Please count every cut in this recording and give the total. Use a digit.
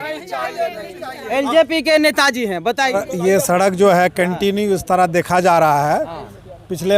0